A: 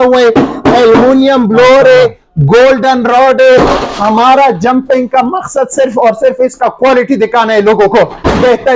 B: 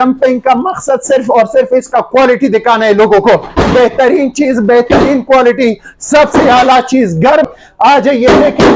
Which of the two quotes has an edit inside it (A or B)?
B